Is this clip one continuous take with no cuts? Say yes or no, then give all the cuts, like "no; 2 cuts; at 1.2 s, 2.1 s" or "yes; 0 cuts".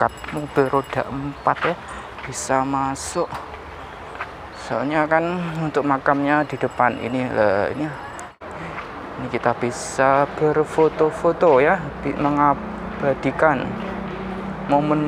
no; 1 cut; at 8.4 s